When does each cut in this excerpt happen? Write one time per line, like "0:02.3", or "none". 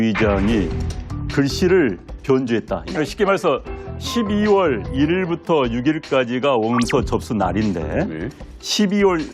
0:04.0